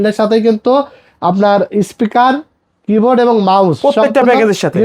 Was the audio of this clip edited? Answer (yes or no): no